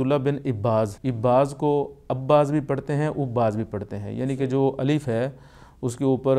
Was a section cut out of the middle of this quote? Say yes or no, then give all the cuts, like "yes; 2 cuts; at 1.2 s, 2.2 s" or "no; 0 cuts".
yes; 1 cut; at 1.0 s